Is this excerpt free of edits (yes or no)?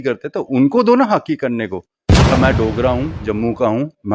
no